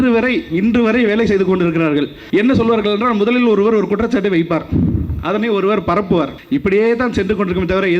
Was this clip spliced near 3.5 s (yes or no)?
no